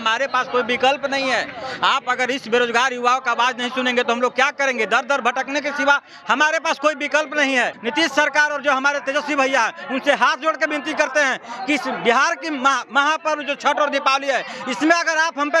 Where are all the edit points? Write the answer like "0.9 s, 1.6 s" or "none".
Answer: 7.8 s